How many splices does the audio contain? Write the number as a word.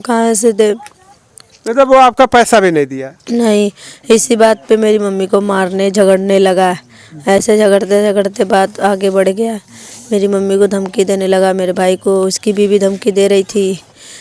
zero